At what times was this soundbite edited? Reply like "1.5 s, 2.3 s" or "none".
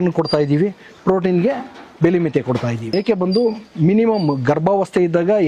2.9 s